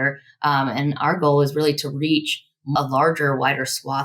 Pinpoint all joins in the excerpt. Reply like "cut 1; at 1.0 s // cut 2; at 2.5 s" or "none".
cut 1; at 2.7 s